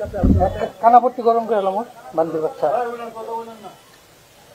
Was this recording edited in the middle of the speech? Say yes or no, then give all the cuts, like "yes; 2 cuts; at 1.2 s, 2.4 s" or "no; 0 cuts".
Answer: no; 0 cuts